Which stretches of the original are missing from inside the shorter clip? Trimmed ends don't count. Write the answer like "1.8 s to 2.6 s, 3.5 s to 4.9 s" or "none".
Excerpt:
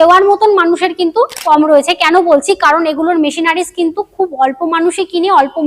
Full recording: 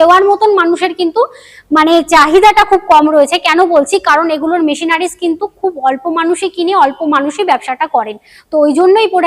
1.4 s to 2.9 s